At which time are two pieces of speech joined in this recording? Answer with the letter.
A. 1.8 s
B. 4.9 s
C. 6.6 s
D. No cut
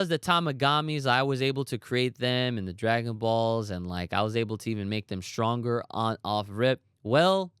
D